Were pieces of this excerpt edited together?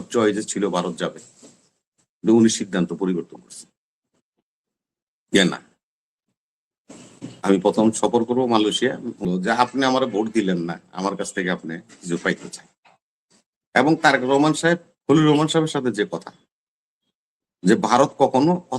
yes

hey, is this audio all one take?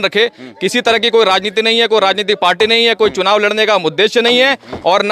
yes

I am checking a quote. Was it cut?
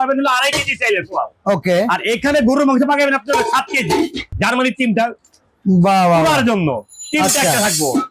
yes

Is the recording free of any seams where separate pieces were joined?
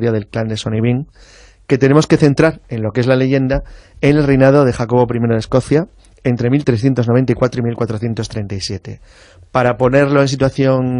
yes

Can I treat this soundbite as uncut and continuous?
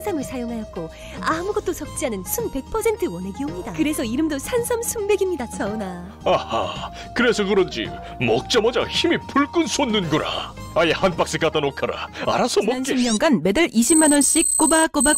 no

